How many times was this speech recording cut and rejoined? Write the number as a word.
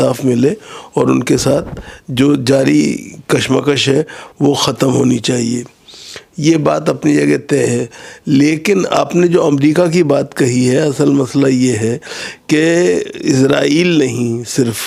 zero